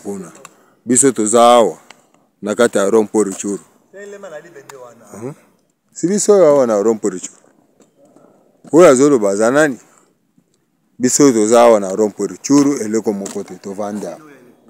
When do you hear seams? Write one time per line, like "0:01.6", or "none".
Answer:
none